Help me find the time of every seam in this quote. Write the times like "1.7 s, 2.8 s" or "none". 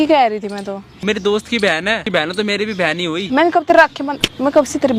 0.9 s, 3.3 s